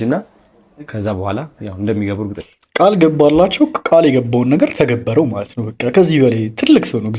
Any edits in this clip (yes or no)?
no